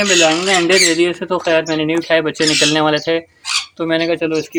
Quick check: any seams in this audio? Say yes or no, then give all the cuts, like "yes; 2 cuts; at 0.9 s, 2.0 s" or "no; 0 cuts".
no; 0 cuts